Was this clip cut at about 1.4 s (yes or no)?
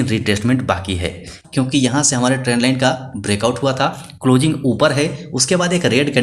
yes